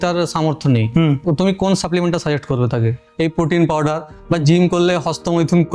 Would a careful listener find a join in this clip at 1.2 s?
yes; 2 cuts; at 1.2 s, 3.0 s

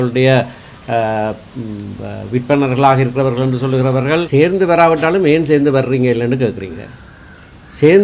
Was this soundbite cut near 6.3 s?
no; 1 cut; at 4.3 s

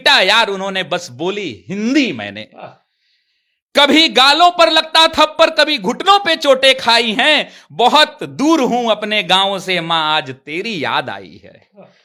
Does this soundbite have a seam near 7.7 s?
no; 0 cuts

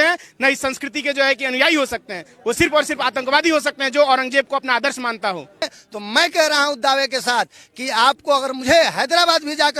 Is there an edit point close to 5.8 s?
yes; 1 cut; at 5.8 s

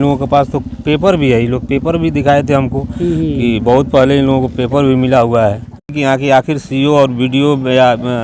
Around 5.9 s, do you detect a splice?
yes; 1 cut; at 5.9 s

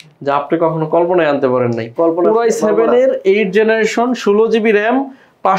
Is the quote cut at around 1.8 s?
no; 0 cuts

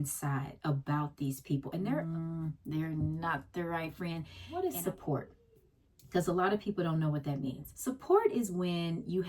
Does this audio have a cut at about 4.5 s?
yes; 3 cuts; at 2.0 s, 4.5 s, 7.7 s

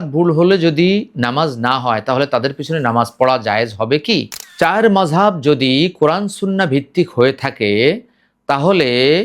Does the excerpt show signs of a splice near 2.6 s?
no; 1 cut; at 4.4 s

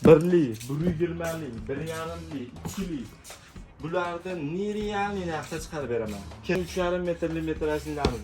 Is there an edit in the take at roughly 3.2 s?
no; 1 cut; at 6.6 s

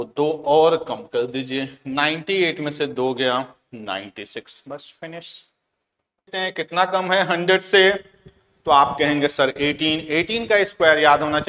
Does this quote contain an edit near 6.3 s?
yes; 1 cut; at 6.3 s

